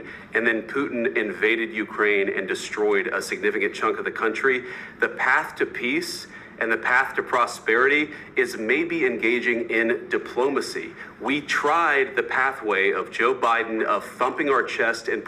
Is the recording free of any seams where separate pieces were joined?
yes; 0 cuts

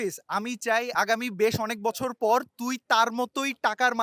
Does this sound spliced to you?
yes; 1 cut; at 0.9 s

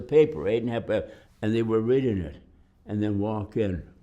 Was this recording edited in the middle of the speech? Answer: yes; 1 cut; at 1.2 s

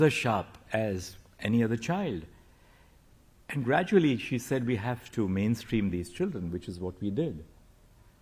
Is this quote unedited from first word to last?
yes; 0 cuts

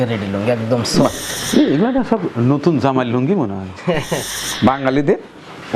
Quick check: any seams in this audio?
yes; 2 cuts; at 1.3 s, 4.4 s

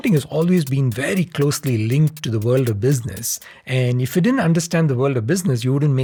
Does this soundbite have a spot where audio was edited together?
no; 0 cuts

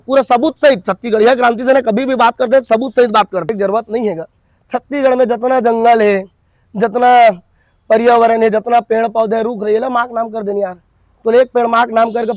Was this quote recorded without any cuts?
no; 1 cut; at 3.5 s

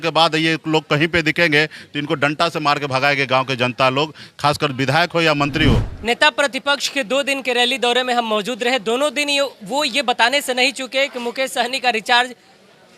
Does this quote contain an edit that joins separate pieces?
yes; 1 cut; at 5.9 s

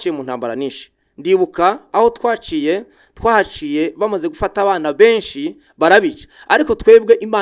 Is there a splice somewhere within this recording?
no; 0 cuts

